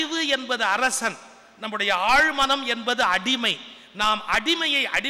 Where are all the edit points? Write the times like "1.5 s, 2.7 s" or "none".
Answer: none